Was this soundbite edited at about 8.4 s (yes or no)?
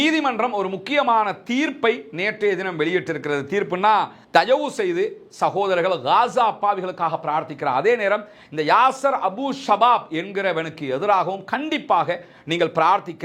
no